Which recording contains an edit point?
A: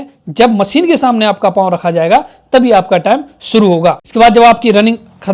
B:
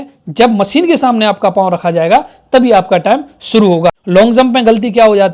B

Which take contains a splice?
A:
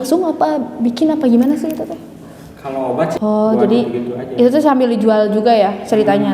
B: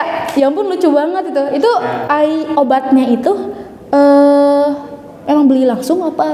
A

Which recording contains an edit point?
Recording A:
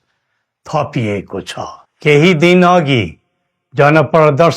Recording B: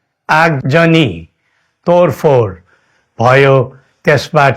A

